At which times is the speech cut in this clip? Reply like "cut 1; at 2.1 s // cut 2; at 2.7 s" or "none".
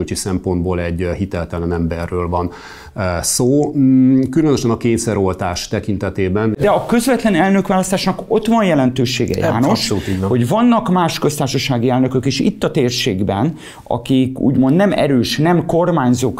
cut 1; at 6.6 s